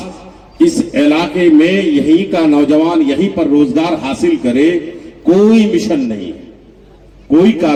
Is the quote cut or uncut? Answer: uncut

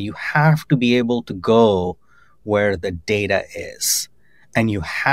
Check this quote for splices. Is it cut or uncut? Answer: uncut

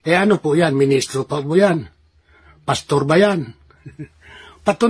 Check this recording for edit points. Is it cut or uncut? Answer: cut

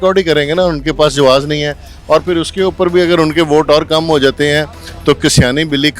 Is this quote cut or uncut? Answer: uncut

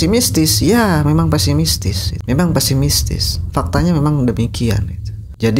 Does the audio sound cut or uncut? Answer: uncut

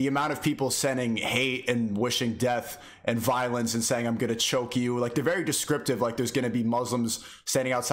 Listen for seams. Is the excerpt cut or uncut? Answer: uncut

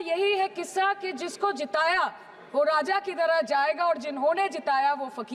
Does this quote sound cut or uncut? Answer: uncut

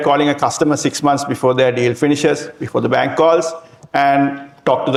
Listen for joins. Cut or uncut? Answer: uncut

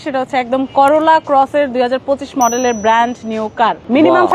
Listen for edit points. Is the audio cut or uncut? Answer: uncut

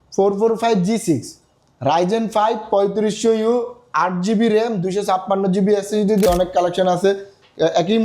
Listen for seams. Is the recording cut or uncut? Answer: cut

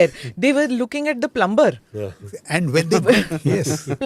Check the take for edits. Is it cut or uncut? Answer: uncut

